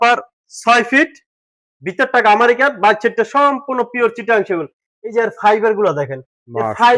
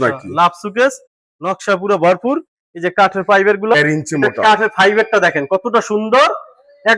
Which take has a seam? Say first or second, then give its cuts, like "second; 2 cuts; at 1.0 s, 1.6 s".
second; 1 cut; at 3.7 s